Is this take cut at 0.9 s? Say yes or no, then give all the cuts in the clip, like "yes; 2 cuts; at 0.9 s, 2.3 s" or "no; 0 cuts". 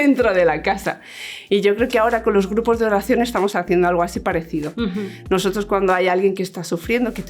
no; 0 cuts